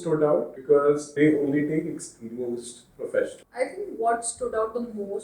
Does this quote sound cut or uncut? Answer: cut